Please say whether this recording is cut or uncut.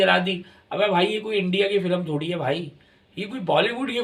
uncut